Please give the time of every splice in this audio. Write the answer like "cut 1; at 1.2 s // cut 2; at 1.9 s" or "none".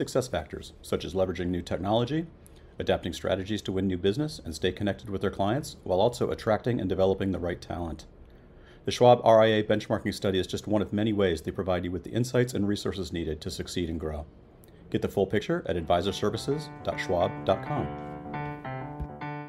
cut 1; at 17.8 s